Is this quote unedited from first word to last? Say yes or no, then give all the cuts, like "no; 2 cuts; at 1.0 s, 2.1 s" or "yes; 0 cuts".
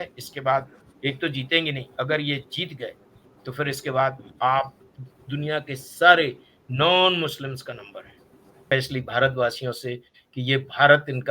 no; 1 cut; at 8.6 s